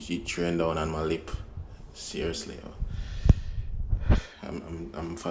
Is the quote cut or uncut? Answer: uncut